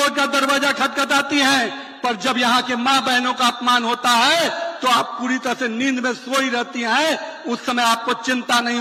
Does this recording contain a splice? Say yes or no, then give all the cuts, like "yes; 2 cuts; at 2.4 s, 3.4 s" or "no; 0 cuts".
no; 0 cuts